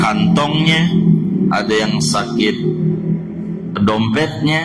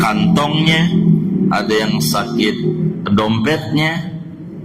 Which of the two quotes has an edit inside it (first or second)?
second